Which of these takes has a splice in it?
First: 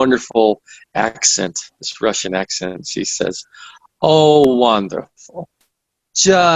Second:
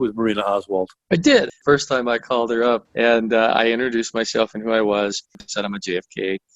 second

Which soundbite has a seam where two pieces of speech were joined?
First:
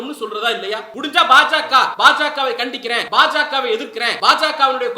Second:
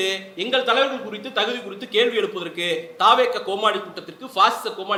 first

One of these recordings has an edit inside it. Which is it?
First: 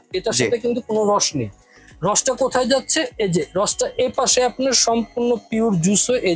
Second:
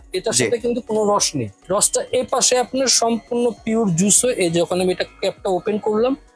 second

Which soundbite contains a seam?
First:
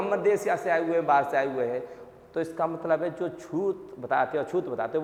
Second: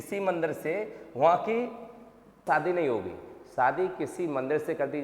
second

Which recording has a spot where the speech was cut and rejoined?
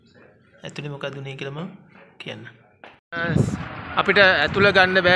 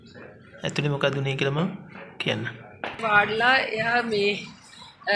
second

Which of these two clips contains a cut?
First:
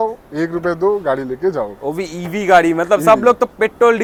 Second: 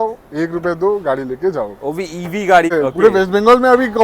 second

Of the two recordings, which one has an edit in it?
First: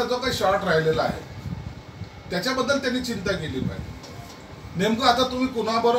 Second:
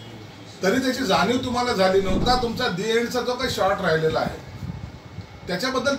second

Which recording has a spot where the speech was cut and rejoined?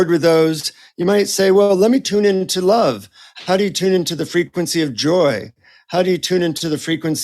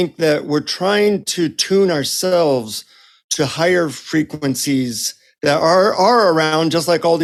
first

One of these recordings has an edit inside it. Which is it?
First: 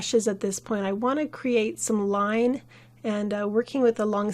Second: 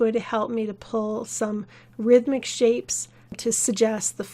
second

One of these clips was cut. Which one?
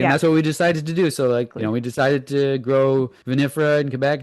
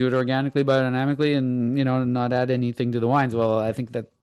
first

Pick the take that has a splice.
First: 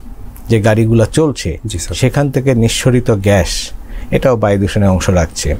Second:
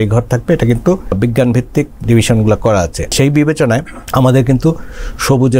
second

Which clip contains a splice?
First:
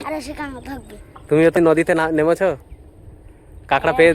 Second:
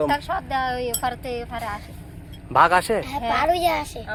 first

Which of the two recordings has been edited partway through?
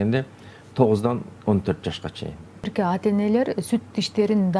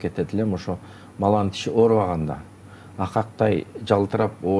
first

